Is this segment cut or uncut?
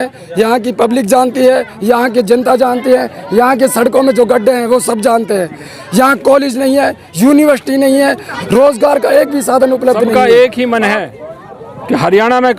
cut